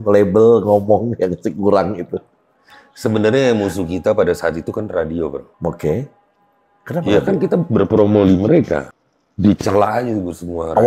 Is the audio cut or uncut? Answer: cut